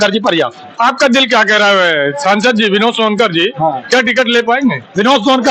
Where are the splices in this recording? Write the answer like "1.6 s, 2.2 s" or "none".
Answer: none

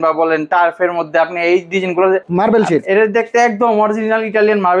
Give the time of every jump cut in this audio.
2.3 s

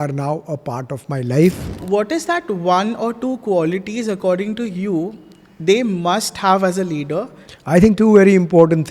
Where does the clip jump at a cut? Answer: 1.8 s, 7.4 s

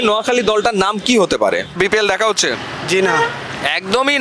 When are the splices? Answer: 1.7 s

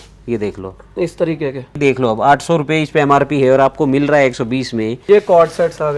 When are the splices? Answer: 1.8 s, 5.0 s

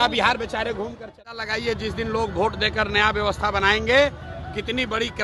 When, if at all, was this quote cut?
1.2 s

